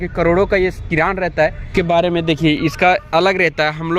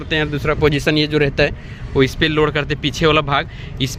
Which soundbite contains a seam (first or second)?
first